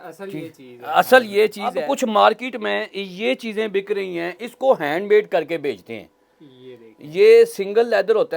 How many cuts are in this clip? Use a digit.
1